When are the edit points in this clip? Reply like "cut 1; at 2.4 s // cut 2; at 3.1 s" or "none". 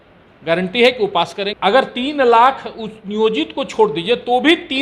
cut 1; at 1.5 s